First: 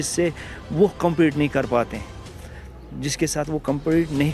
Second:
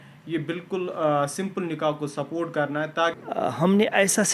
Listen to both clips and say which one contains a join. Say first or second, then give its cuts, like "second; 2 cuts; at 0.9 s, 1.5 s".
second; 1 cut; at 3.2 s